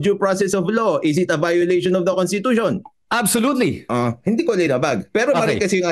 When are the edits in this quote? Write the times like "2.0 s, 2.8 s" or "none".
3.8 s